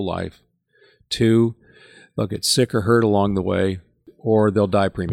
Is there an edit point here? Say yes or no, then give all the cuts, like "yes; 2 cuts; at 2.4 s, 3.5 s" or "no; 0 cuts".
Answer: yes; 1 cut; at 4.1 s